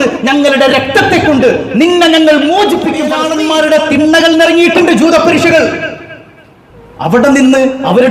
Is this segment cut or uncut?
cut